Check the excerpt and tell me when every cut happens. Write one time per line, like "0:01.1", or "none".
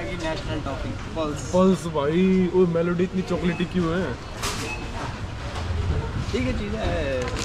none